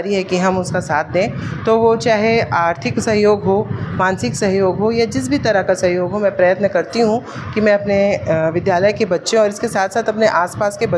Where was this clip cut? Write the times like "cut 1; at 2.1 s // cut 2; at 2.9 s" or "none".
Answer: none